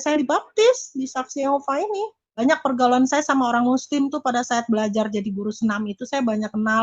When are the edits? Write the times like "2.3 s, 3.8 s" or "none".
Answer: 2.4 s